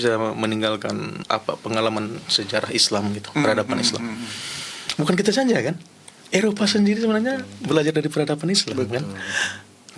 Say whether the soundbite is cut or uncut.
cut